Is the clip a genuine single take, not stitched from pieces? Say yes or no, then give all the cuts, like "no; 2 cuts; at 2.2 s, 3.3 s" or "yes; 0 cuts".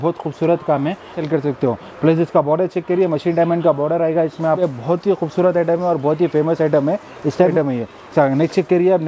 no; 3 cuts; at 1.2 s, 4.6 s, 7.5 s